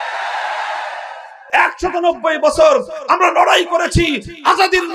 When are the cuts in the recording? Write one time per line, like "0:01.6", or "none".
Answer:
0:01.4